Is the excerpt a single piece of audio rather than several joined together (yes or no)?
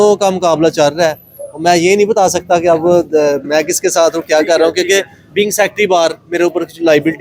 yes